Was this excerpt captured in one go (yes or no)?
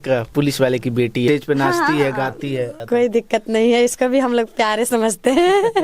no